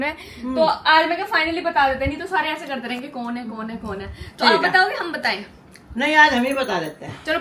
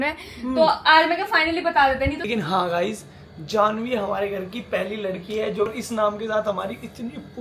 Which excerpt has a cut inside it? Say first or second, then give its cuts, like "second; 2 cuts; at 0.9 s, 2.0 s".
second; 2 cuts; at 2.3 s, 5.7 s